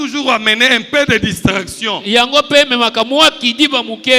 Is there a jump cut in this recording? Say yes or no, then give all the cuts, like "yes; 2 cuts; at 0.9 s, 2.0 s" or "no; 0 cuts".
no; 0 cuts